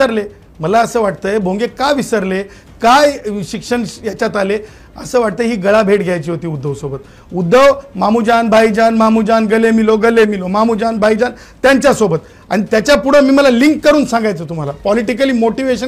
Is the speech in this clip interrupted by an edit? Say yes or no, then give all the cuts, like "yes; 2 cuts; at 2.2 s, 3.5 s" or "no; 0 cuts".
no; 0 cuts